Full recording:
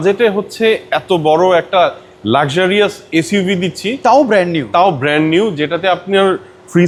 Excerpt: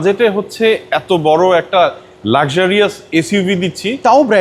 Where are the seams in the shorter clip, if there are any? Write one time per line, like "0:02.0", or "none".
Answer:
none